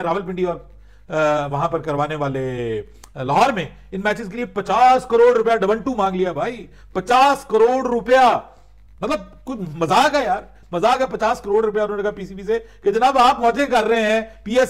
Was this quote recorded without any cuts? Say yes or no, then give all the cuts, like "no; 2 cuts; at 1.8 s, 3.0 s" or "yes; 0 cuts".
yes; 0 cuts